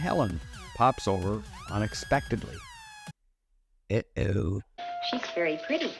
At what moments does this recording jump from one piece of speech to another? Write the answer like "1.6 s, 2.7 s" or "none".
4.7 s